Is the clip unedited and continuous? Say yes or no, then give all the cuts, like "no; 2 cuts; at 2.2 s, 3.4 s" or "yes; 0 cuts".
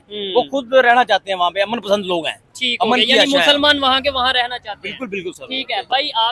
yes; 0 cuts